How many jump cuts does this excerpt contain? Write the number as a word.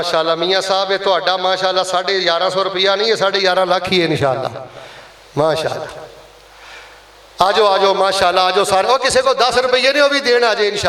zero